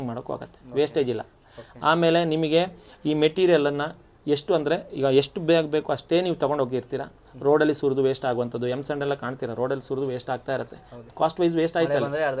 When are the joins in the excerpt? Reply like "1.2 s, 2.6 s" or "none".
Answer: none